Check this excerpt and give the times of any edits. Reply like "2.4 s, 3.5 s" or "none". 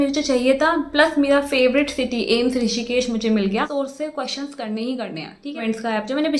3.7 s, 5.6 s